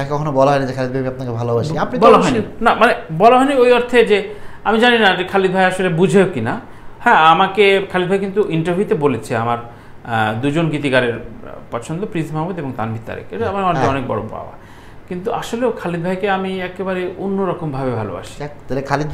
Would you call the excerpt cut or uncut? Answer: uncut